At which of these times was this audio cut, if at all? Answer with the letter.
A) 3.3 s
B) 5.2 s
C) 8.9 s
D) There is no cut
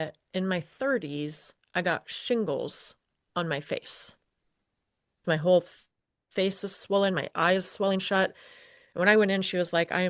B